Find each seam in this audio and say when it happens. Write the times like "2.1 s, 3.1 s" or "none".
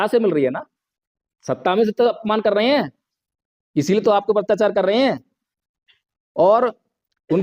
2.2 s